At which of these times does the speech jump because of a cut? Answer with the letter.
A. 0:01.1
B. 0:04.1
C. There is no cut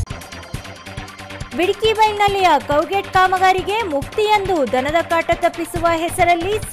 A